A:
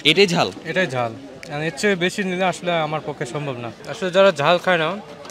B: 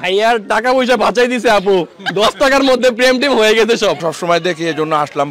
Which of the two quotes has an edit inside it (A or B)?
B